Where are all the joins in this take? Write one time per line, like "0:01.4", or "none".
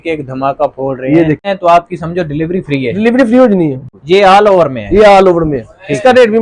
0:01.5
0:03.8